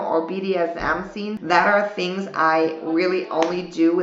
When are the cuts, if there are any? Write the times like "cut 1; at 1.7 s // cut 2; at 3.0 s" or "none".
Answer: cut 1; at 1.4 s